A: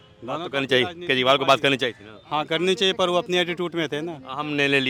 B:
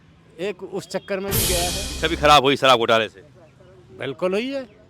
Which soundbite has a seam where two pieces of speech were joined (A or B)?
B